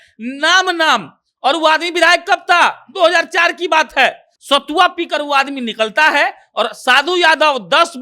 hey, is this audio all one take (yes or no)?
no